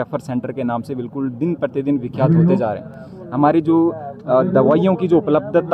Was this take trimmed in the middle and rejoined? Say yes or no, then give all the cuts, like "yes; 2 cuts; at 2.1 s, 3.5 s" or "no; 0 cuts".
no; 0 cuts